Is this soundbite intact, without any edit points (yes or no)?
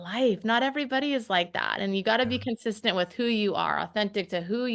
yes